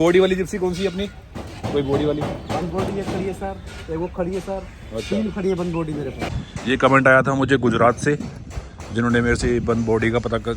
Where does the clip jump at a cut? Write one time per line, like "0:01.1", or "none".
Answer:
0:06.3